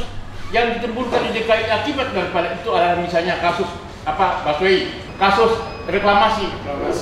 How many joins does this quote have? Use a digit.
1